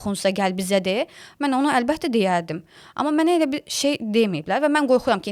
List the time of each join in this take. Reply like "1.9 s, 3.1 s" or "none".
none